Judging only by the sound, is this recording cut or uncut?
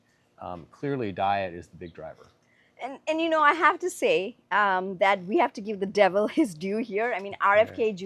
uncut